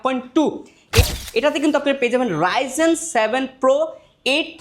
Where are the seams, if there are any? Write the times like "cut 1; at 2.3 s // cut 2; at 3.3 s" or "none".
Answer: cut 1; at 1.1 s